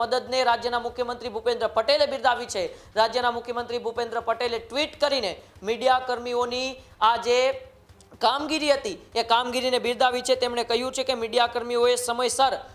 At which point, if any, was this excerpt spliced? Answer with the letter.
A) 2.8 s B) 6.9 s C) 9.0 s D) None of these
D